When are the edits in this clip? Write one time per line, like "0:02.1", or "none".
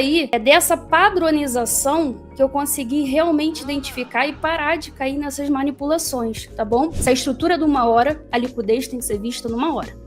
0:07.0